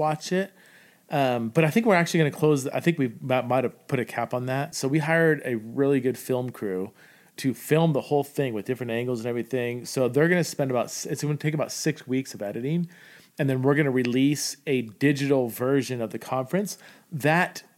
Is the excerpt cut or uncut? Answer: cut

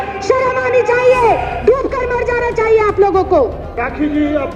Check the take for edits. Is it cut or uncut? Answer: uncut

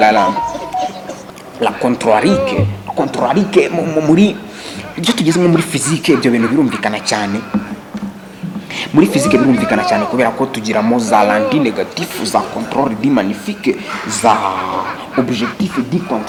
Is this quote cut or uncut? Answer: uncut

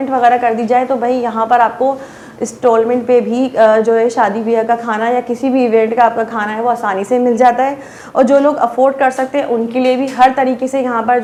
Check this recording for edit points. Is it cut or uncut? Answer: uncut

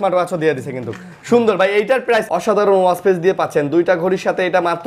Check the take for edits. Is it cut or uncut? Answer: cut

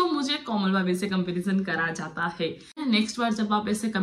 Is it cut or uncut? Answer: cut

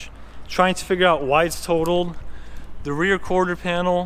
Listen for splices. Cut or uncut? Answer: uncut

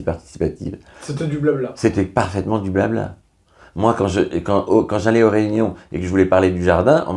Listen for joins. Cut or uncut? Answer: uncut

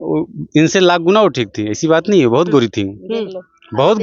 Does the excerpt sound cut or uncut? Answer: uncut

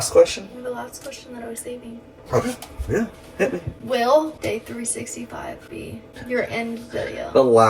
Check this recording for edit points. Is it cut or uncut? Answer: cut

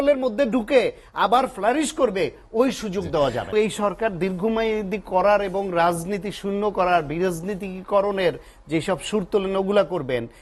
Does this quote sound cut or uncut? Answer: cut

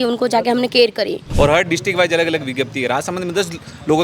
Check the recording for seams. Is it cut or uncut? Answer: cut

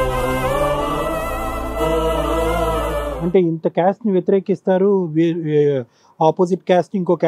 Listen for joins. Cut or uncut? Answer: cut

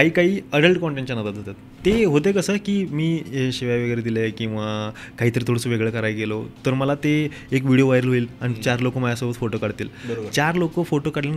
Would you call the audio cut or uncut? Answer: cut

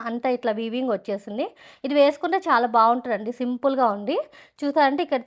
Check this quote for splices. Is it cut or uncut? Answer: uncut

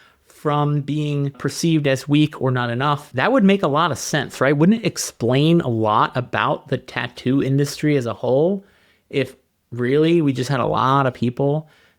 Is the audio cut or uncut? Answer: cut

